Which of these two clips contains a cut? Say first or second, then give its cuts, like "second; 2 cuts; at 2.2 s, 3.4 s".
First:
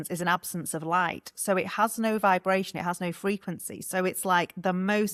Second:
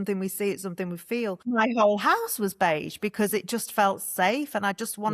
second; 1 cut; at 1.4 s